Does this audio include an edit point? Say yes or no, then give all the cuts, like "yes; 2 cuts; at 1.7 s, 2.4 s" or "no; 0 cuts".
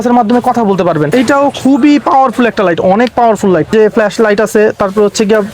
yes; 2 cuts; at 1.1 s, 3.7 s